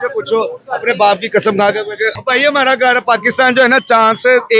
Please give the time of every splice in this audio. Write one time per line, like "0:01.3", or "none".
0:02.2